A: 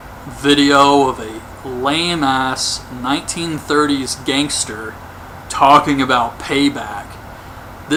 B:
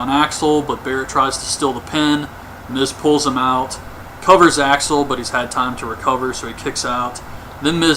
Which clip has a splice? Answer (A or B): B